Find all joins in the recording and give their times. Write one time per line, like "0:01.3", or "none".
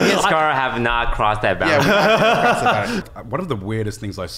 0:03.1